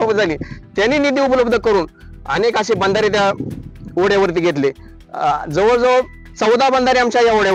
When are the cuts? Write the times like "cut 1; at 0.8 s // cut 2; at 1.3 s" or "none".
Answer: none